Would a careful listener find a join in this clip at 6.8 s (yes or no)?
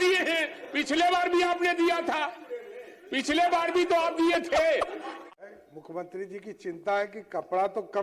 no